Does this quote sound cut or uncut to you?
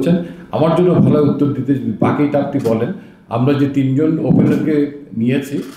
uncut